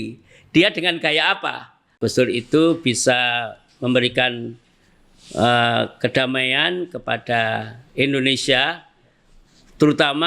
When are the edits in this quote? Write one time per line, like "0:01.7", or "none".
0:01.9

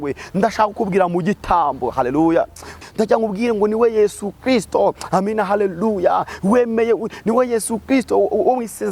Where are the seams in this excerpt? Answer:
0:02.8

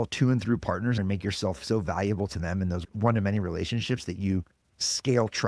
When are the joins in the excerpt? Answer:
0:01.0
0:02.8

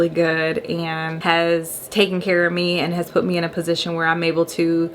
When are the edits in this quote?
0:01.1
0:01.8

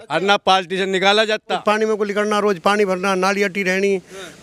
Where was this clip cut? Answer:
0:01.6

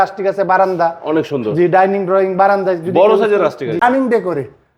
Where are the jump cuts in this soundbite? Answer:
0:03.8

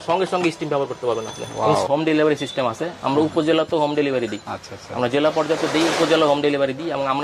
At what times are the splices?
0:01.8

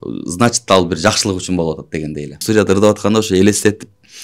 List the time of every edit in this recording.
0:02.4

